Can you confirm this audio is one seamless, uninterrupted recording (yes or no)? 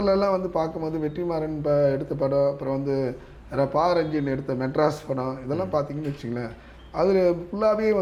yes